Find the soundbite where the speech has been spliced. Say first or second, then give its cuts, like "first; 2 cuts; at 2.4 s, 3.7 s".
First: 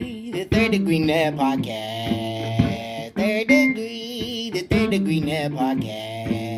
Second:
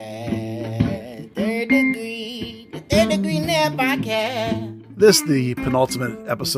second; 1 cut; at 4.8 s